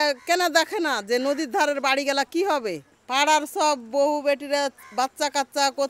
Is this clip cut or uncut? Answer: cut